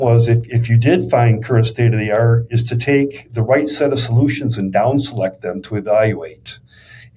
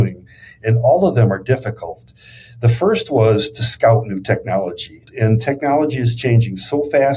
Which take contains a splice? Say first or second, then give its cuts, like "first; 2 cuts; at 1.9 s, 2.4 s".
second; 1 cut; at 4.9 s